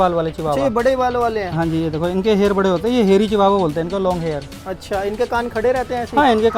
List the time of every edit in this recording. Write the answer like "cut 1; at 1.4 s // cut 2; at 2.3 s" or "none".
none

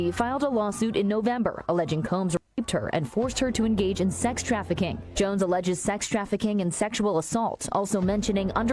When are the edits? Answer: cut 1; at 5.0 s

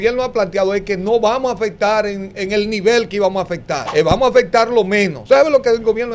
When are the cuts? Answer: cut 1; at 3.8 s // cut 2; at 5.2 s

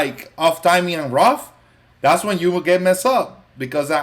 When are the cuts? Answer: none

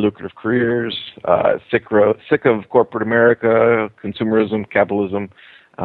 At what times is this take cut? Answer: none

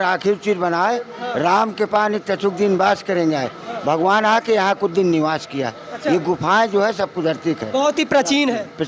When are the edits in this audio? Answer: none

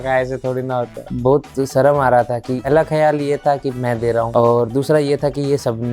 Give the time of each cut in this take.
cut 1; at 1.1 s // cut 2; at 2.5 s // cut 3; at 4.3 s

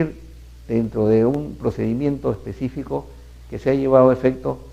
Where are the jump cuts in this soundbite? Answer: cut 1; at 2.8 s

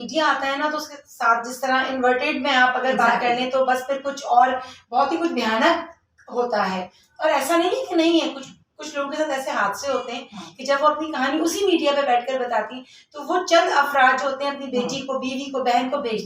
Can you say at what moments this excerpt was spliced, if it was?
none

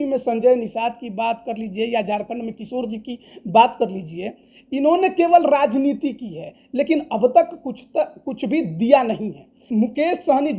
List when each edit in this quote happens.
cut 1; at 9.6 s

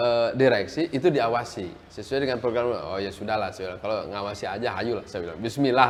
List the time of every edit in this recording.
none

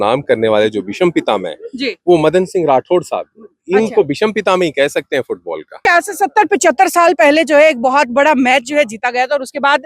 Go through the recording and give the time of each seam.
cut 1; at 5.9 s

